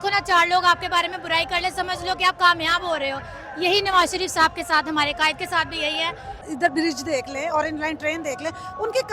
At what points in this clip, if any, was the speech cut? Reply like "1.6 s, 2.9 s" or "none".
6.4 s